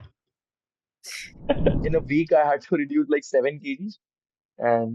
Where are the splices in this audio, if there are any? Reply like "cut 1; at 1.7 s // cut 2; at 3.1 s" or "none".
cut 1; at 1.8 s